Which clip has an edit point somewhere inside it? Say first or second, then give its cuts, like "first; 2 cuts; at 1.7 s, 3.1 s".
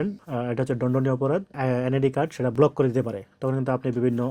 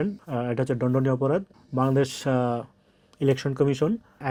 first; 1 cut; at 1.5 s